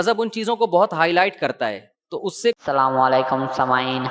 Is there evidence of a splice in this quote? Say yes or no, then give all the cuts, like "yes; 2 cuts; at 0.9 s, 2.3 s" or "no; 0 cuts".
yes; 1 cut; at 2.6 s